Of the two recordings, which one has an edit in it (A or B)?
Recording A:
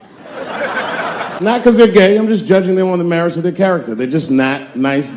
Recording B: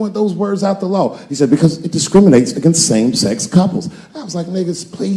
A